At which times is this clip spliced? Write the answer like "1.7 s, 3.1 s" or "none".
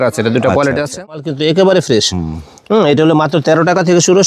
1.3 s